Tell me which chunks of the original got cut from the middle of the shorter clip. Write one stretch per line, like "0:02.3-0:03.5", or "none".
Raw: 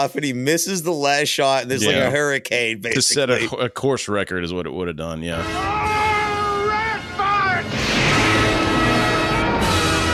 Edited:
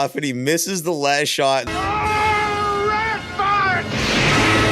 0:01.7-0:05.5